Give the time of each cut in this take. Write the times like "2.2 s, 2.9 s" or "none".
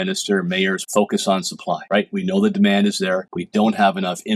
0.8 s, 1.8 s, 3.3 s